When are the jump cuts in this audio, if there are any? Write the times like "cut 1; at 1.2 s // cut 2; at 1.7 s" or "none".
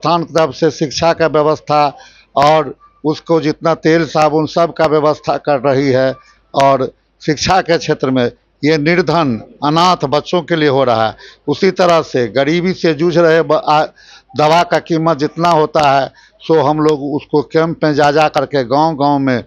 none